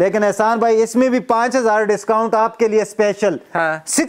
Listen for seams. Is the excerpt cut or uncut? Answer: uncut